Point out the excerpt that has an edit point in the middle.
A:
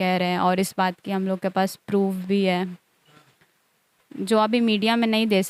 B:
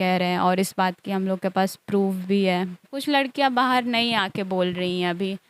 B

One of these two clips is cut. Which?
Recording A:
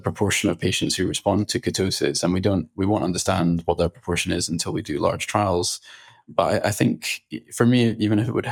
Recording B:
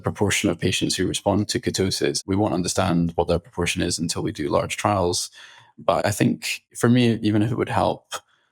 B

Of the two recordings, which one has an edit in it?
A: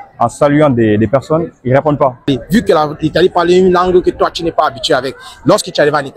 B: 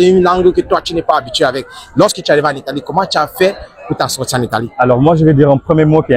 A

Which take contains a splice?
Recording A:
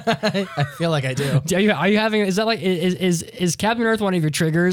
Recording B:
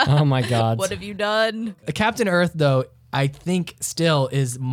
B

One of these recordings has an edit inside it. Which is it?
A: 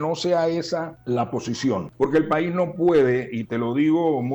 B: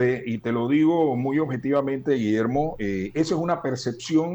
A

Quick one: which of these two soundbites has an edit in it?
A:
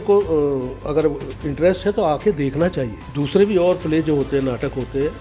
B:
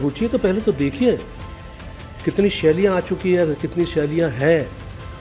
A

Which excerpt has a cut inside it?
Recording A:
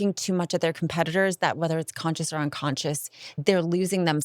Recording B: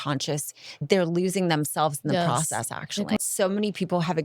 B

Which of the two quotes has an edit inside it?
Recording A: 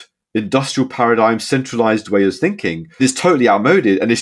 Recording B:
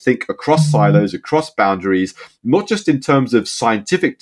A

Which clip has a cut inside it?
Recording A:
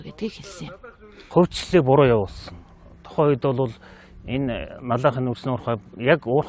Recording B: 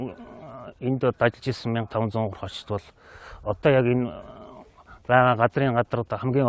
B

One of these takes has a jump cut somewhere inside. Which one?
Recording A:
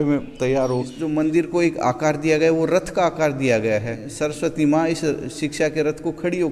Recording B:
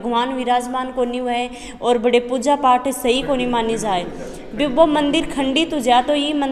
A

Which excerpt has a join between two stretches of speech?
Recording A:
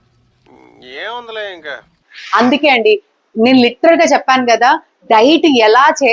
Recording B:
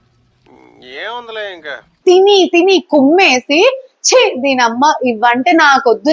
B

